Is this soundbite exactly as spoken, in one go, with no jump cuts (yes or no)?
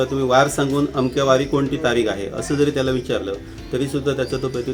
yes